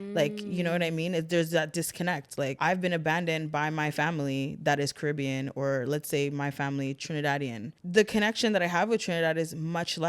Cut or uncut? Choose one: cut